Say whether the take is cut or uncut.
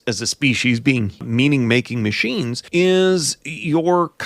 cut